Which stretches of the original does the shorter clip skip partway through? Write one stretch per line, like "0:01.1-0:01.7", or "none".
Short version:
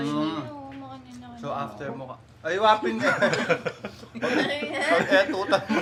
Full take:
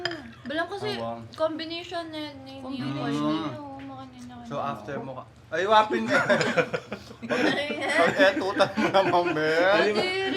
none